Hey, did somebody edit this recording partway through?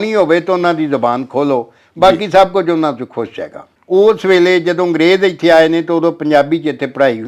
no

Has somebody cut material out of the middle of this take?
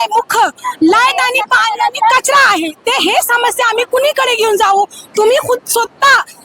no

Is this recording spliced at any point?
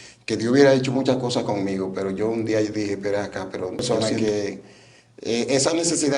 yes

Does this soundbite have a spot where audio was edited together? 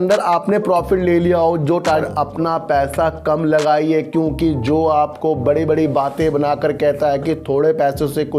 yes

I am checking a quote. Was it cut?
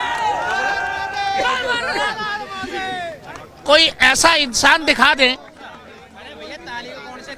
no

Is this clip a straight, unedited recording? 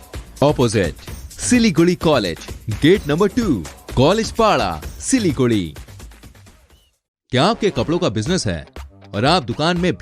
yes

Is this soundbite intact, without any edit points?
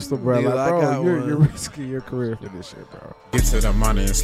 no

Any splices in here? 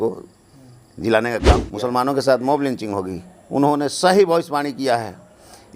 yes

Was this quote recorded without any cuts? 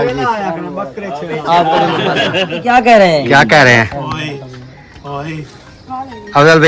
no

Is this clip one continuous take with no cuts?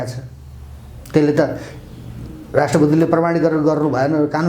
yes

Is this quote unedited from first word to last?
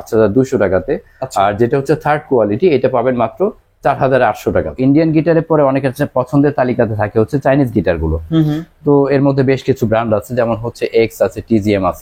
no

